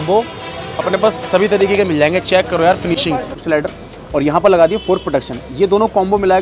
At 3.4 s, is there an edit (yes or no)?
yes